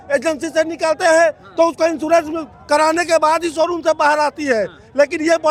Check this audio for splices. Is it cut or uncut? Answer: uncut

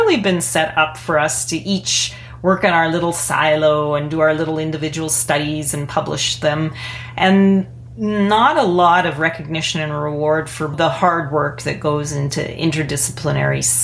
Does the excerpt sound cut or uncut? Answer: cut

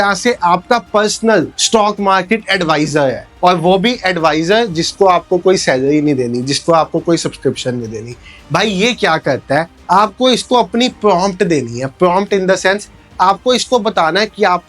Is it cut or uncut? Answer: uncut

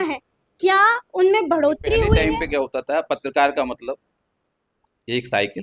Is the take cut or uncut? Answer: cut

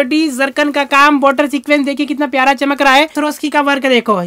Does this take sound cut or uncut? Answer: cut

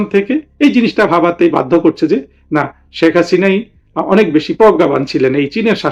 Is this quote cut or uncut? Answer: uncut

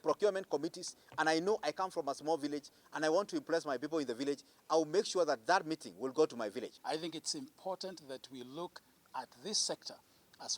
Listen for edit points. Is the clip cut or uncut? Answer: cut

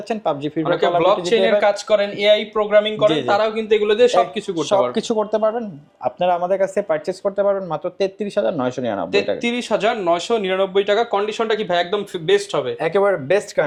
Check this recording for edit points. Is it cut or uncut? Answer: uncut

